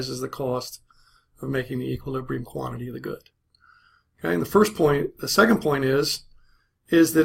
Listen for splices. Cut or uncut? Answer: cut